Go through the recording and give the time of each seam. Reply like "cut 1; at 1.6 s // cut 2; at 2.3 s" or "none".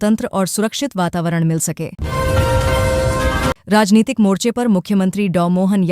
cut 1; at 2.0 s // cut 2; at 3.6 s